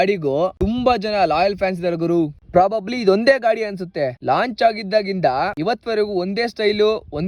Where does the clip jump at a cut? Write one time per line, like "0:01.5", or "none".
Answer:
0:02.4